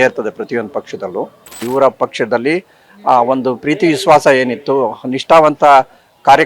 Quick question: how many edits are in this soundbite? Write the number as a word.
one